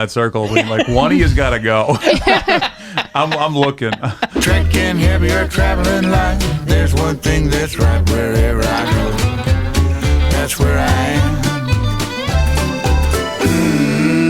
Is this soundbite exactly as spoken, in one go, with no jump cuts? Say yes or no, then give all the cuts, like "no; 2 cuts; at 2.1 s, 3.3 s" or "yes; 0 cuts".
no; 1 cut; at 4.4 s